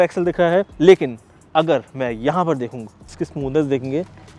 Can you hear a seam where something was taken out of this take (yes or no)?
yes